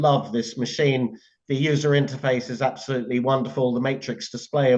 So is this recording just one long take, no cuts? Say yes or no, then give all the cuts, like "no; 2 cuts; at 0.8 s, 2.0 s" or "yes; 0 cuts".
yes; 0 cuts